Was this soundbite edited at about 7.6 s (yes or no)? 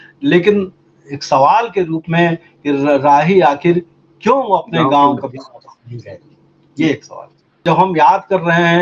yes